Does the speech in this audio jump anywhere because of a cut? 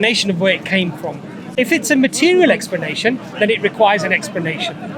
yes; 1 cut; at 1.4 s

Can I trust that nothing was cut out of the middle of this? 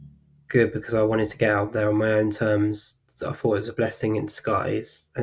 yes; 0 cuts

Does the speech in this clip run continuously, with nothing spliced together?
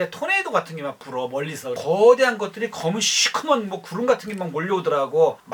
no; 1 cut; at 1.8 s

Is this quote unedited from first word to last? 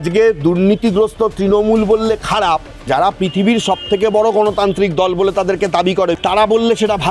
no; 2 cuts; at 2.8 s, 6.2 s

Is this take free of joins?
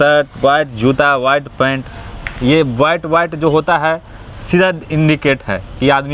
yes; 0 cuts

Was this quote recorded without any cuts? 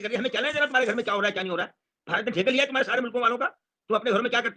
yes; 0 cuts

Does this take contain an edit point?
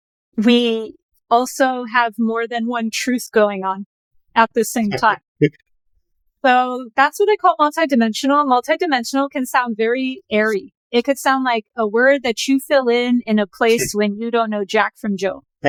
no; 0 cuts

